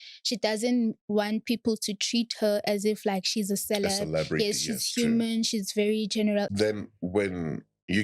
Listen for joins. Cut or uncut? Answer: cut